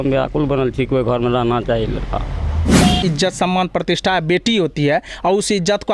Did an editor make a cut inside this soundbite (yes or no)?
yes